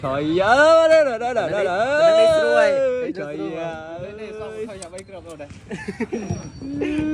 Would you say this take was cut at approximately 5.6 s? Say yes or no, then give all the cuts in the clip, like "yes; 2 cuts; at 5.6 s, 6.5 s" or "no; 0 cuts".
no; 0 cuts